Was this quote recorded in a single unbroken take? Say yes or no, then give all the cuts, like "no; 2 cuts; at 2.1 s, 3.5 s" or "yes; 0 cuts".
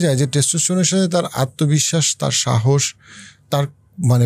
yes; 0 cuts